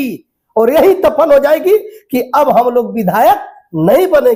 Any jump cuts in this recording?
no; 0 cuts

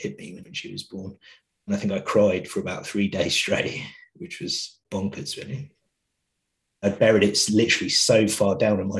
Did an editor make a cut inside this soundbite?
yes; 3 cuts; at 1.7 s, 4.7 s, 6.4 s

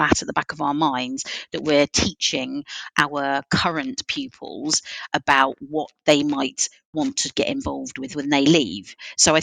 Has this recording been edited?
yes; 1 cut; at 5.1 s

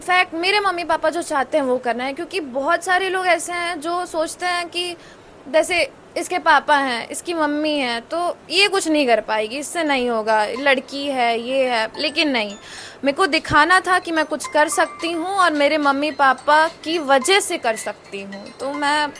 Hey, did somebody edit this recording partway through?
no; 0 cuts

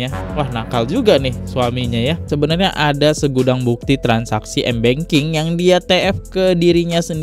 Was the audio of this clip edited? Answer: yes; 1 cut; at 2.3 s

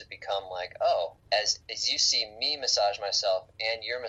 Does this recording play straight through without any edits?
no; 1 cut; at 1.3 s

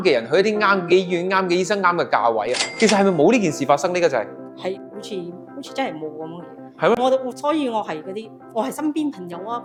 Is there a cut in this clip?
no; 0 cuts

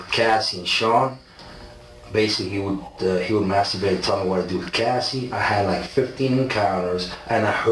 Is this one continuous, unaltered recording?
yes; 0 cuts

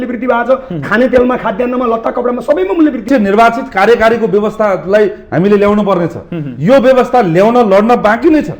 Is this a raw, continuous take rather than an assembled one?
no; 1 cut; at 3.1 s

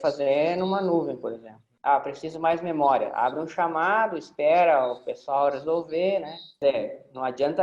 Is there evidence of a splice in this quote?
yes; 2 cuts; at 1.7 s, 6.6 s

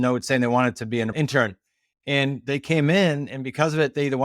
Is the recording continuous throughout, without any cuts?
no; 1 cut; at 1.1 s

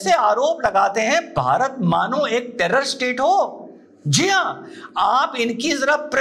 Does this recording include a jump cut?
no; 0 cuts

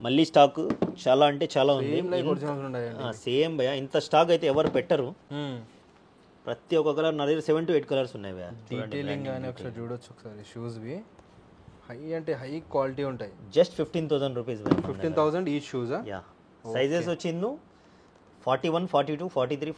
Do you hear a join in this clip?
no; 0 cuts

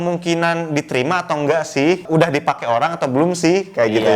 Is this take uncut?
no; 1 cut; at 2.0 s

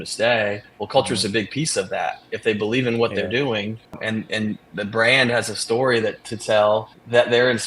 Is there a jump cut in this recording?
no; 0 cuts

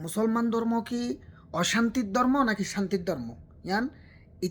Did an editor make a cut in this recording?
no; 0 cuts

